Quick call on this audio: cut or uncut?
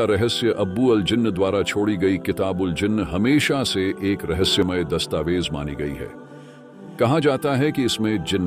uncut